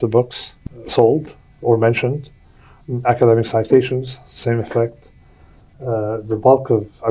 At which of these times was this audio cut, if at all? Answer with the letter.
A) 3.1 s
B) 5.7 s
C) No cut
C